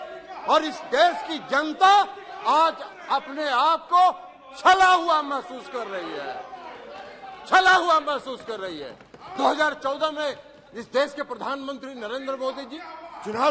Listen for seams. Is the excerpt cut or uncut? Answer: uncut